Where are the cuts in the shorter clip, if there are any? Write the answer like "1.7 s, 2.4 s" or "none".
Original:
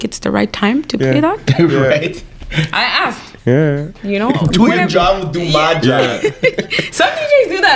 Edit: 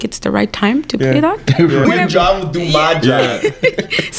1.8 s